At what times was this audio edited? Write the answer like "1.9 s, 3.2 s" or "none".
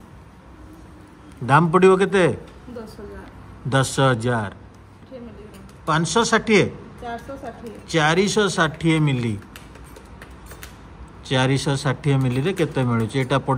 5.1 s